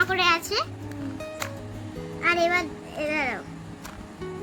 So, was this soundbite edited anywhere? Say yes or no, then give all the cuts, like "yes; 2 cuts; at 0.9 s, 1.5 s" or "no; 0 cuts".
no; 0 cuts